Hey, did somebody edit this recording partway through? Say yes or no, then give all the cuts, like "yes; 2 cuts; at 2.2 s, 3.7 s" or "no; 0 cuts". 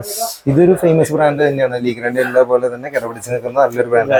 no; 0 cuts